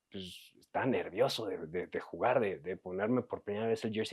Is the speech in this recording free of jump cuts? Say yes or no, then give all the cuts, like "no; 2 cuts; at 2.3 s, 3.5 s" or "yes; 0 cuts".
yes; 0 cuts